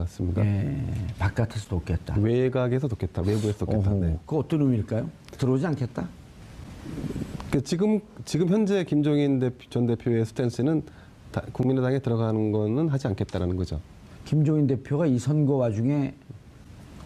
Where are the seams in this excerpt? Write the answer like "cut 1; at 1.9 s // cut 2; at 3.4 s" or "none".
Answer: none

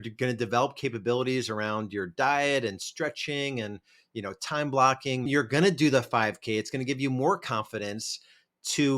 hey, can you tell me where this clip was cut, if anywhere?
cut 1; at 5.3 s

